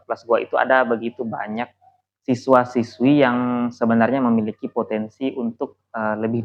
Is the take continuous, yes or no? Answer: yes